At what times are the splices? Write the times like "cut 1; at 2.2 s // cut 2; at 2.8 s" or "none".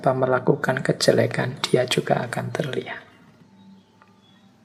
none